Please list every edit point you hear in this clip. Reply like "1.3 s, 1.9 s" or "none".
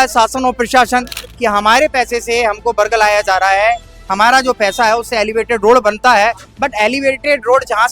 1.2 s